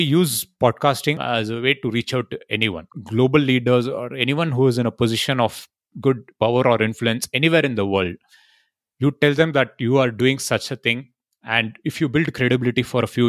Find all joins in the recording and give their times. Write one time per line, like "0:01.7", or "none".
0:01.2
0:02.8